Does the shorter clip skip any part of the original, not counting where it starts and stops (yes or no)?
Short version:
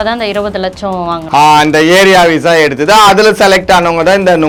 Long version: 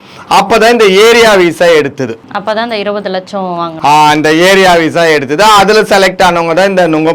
no